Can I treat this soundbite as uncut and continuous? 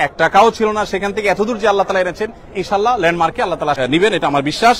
no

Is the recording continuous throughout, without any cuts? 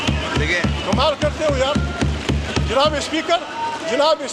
yes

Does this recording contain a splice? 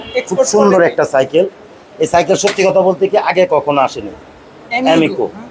no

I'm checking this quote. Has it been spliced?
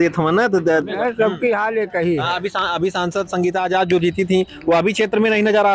yes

